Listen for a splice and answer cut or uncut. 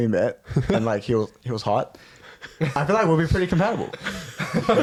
uncut